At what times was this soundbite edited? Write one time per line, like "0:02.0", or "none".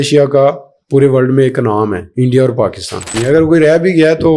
0:02.0
0:03.2